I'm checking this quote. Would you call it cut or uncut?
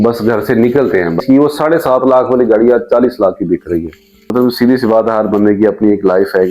cut